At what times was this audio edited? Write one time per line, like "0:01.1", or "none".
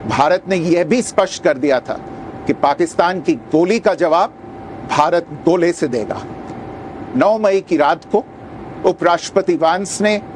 none

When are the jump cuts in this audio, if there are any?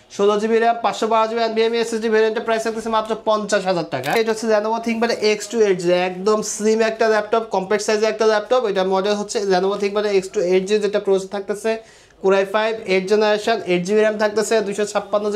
0:04.2

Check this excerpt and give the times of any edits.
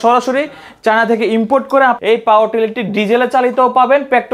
0:02.0

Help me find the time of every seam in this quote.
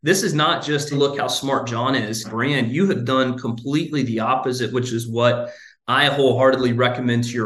0:00.9

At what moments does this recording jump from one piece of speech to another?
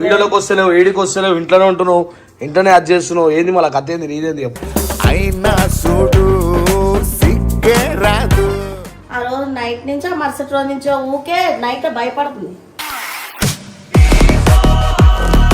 0:08.8

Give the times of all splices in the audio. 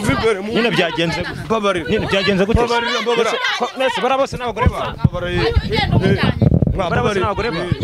none

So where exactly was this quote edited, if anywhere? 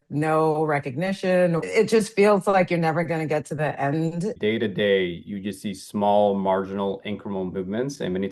0:01.6
0:04.4

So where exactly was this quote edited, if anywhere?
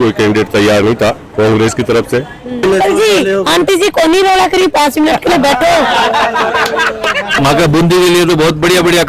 0:01.2
0:02.6
0:07.4

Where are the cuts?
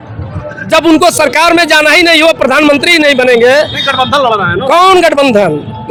none

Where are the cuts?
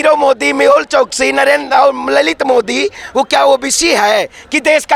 none

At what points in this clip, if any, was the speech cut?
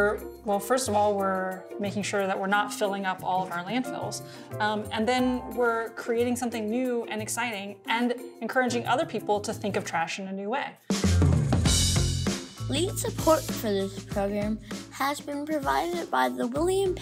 0:10.8

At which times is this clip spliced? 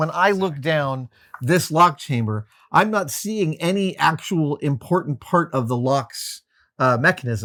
none

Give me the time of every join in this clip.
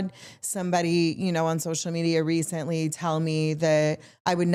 none

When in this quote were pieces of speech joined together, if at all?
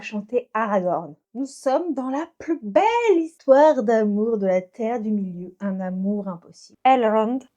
0:01.2
0:06.7

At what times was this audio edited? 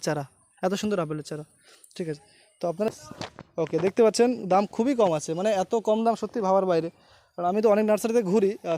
0:02.9

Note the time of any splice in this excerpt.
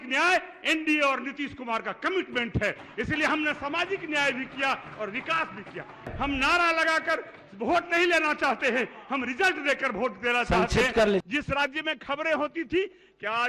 0:06.1
0:11.2

